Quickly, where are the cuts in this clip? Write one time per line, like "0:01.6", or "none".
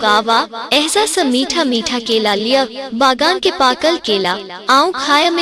0:02.8